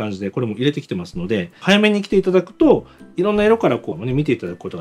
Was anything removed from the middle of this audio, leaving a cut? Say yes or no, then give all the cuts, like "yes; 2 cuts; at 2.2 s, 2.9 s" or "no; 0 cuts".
yes; 2 cuts; at 1.6 s, 3.9 s